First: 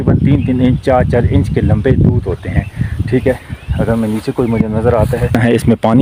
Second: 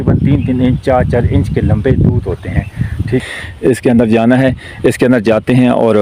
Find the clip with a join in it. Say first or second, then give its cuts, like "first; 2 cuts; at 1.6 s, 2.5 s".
second; 1 cut; at 3.2 s